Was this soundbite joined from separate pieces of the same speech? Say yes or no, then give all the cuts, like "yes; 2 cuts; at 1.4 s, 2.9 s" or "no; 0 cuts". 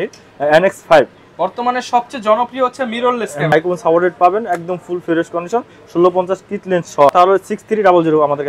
yes; 2 cuts; at 3.5 s, 7.1 s